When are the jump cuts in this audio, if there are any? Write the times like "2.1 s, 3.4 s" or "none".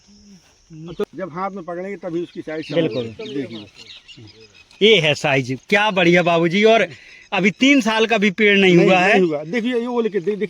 1.0 s